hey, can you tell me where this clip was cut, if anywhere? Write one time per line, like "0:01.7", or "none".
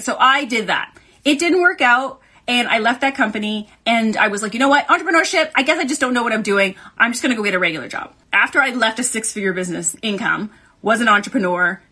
0:07.0
0:08.2